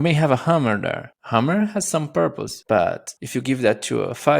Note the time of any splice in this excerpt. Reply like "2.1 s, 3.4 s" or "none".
1.1 s, 2.5 s, 3.1 s